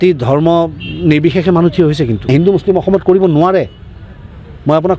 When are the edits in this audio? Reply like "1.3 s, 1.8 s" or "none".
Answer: 2.3 s